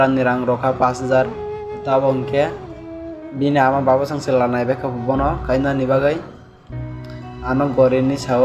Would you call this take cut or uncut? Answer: uncut